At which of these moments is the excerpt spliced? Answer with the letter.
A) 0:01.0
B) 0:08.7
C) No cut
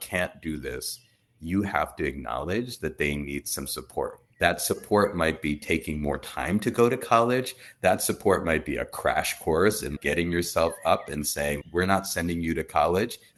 C